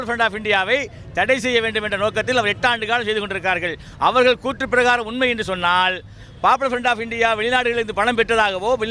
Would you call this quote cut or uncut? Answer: uncut